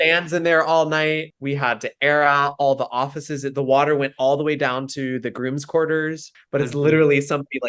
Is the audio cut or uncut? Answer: cut